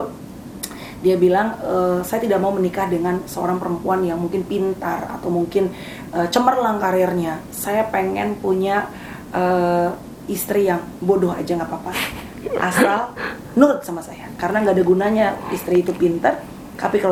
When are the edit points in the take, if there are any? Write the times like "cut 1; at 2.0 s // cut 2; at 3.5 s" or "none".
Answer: none